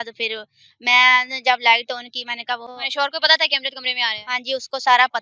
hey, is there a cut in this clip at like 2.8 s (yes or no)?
yes